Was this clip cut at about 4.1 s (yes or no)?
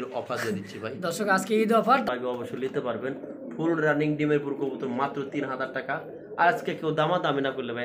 no